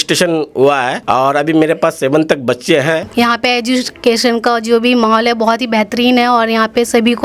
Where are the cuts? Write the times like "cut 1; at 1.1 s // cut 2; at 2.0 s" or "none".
cut 1; at 1.0 s // cut 2; at 3.1 s